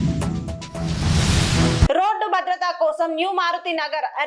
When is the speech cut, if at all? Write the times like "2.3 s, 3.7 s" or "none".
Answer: 1.7 s